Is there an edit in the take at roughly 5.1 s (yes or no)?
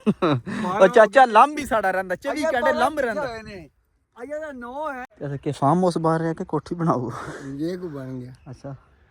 yes